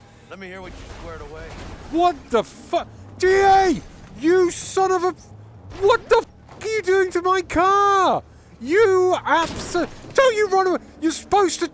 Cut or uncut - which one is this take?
uncut